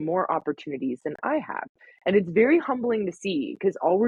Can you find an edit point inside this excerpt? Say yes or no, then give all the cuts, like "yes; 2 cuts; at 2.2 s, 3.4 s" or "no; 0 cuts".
no; 0 cuts